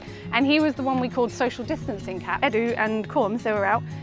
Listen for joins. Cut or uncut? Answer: cut